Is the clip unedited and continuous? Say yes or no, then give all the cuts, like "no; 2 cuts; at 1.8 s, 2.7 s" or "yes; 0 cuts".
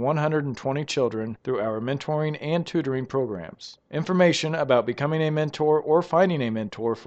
yes; 0 cuts